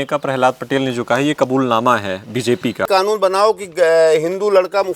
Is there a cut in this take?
yes; 1 cut; at 2.9 s

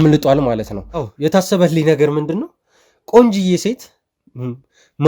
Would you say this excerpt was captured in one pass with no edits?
no; 1 cut; at 1.1 s

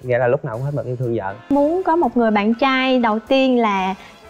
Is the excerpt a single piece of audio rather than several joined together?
no; 1 cut; at 1.5 s

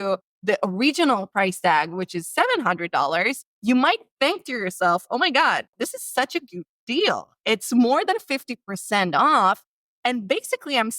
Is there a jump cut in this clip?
yes; 2 cuts; at 3.5 s, 5.7 s

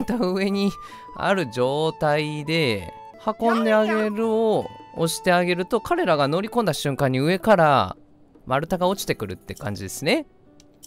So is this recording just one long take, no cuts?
yes; 0 cuts

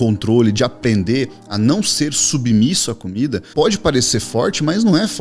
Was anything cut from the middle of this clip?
yes; 1 cut; at 3.4 s

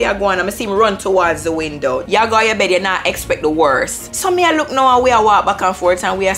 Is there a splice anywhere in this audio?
yes; 2 cuts; at 2.0 s, 4.0 s

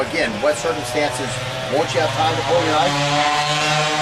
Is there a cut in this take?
no; 0 cuts

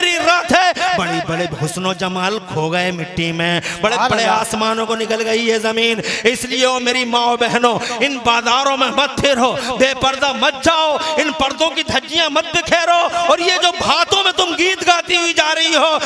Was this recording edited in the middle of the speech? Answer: no; 0 cuts

